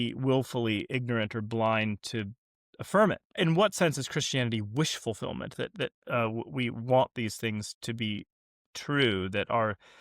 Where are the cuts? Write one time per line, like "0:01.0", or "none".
0:03.4

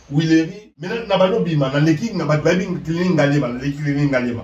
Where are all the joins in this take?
0:01.0

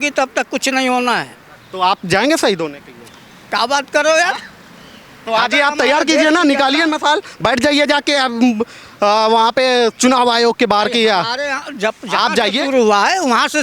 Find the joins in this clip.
0:01.6

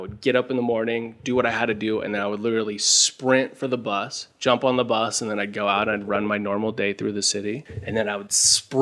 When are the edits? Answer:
none

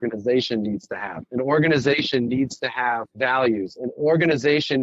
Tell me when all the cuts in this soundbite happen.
0:03.1

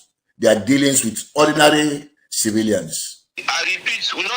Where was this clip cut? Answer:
0:03.3

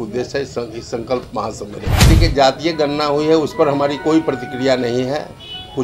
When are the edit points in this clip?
0:01.9

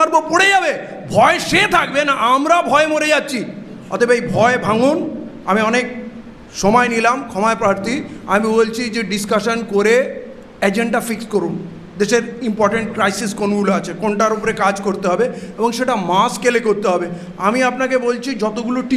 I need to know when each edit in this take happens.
none

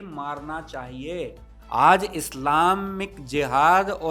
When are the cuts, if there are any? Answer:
0:01.5

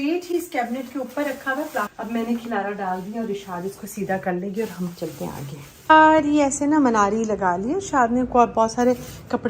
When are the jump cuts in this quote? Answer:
0:01.9
0:05.9

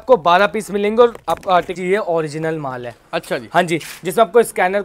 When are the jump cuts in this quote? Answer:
0:01.7

